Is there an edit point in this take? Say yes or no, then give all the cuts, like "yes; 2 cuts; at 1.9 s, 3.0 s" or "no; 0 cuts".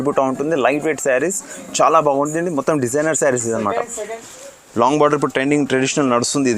yes; 1 cut; at 4.2 s